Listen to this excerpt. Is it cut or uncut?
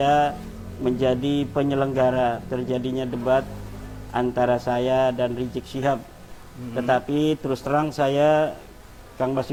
uncut